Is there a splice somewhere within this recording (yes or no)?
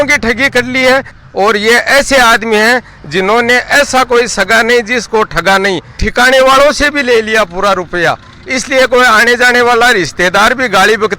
yes